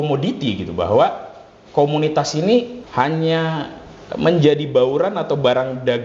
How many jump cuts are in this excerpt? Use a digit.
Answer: 1